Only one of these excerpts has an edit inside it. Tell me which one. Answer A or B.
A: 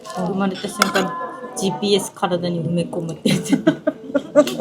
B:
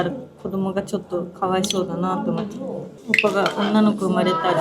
B